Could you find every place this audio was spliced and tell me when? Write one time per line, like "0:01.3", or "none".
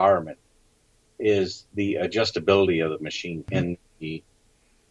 0:03.5